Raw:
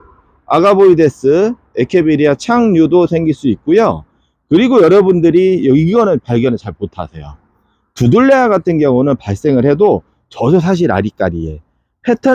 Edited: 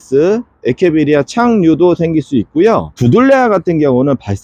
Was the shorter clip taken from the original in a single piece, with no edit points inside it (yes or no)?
no